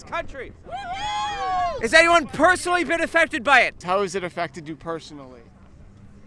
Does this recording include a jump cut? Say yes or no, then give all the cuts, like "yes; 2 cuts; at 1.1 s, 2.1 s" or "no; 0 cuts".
yes; 2 cuts; at 1.8 s, 3.8 s